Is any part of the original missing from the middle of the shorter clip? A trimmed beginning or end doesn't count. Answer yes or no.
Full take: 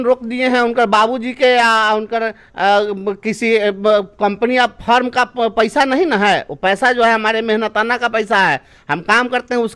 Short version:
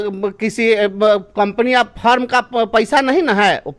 no